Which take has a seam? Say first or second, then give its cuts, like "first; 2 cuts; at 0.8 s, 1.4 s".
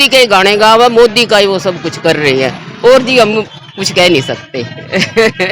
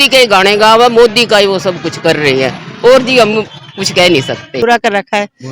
second; 1 cut; at 4.5 s